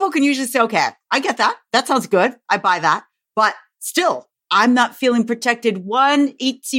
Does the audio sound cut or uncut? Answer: uncut